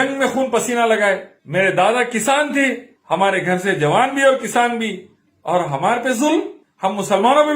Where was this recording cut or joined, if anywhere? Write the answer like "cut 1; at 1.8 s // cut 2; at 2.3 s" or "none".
cut 1; at 1.3 s // cut 2; at 2.9 s // cut 3; at 6.6 s